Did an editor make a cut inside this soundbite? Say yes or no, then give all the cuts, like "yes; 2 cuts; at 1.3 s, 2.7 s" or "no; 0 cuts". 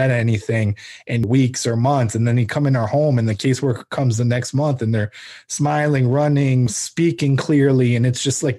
yes; 2 cuts; at 1.2 s, 6.7 s